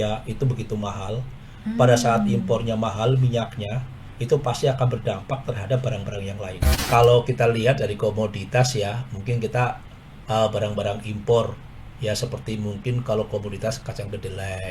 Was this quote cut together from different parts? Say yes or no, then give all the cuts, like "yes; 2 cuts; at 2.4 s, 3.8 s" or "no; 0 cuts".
yes; 1 cut; at 6.8 s